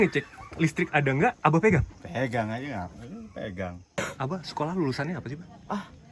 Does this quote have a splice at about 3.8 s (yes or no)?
yes